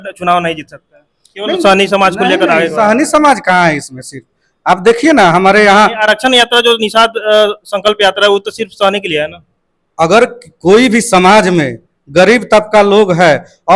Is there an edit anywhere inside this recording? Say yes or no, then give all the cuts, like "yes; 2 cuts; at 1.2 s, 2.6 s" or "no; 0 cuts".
no; 0 cuts